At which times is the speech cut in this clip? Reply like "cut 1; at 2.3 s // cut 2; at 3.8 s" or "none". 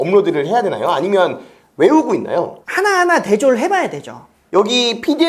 cut 1; at 2.6 s // cut 2; at 4.5 s